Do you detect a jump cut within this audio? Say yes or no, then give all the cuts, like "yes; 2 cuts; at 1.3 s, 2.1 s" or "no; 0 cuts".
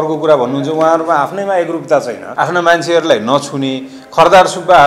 yes; 1 cut; at 2.2 s